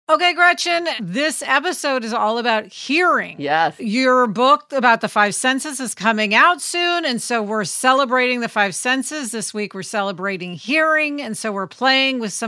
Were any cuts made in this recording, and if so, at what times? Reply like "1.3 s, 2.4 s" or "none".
1.0 s